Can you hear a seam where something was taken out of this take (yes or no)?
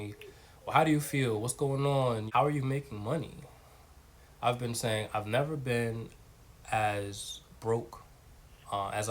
yes